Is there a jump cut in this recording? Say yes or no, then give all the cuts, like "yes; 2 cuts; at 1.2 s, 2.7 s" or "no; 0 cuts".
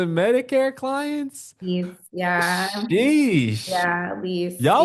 no; 0 cuts